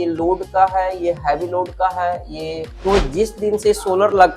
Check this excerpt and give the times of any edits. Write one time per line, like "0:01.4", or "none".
0:02.7